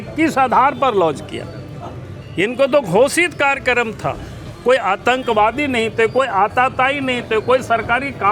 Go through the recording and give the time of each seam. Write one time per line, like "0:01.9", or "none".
none